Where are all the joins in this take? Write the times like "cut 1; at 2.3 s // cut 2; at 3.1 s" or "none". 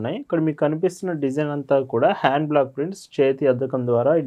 none